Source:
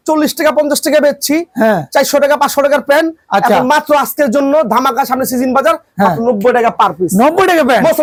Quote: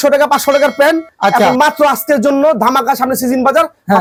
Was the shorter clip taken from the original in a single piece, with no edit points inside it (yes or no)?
yes